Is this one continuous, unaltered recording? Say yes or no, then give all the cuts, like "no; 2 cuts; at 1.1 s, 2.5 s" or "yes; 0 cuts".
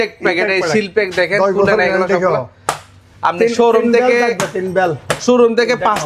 yes; 0 cuts